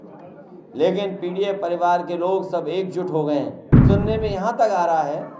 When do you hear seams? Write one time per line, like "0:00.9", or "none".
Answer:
0:03.7